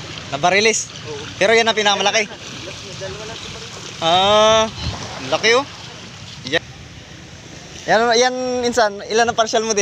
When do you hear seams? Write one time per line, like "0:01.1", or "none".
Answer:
0:06.6